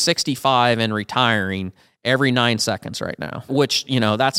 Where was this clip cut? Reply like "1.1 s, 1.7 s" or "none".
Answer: 3.5 s